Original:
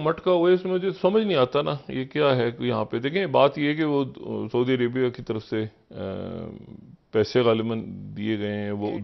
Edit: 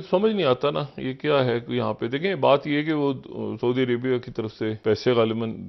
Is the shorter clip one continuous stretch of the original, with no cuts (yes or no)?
no